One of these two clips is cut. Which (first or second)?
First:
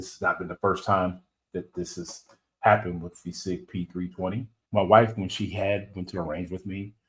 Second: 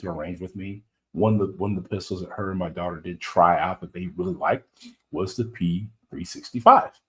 first